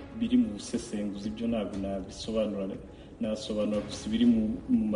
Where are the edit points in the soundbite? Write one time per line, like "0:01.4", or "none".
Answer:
none